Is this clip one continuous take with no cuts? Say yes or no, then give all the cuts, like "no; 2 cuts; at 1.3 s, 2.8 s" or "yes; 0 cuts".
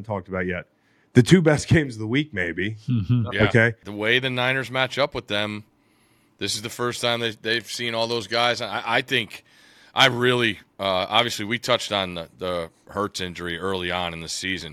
no; 1 cut; at 3.8 s